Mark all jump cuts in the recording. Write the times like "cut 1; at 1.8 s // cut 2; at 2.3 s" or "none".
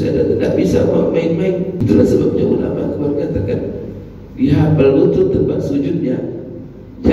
cut 1; at 1.8 s